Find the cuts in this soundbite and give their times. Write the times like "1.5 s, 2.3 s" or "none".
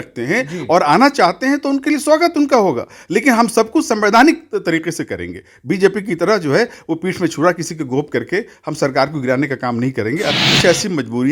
10.4 s